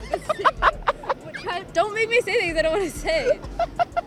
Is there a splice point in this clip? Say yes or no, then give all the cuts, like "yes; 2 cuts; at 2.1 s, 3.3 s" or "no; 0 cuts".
no; 0 cuts